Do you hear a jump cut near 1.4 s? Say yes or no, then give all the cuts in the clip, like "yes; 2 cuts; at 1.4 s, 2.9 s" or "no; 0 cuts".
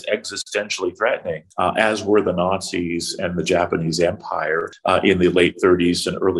yes; 2 cuts; at 1.4 s, 4.7 s